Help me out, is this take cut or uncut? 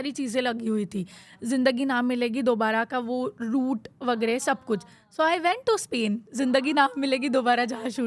uncut